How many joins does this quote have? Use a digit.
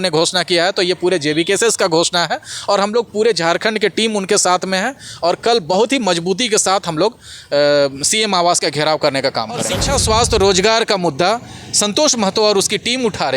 1